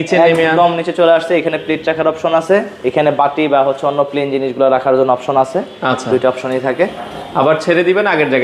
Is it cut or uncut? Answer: uncut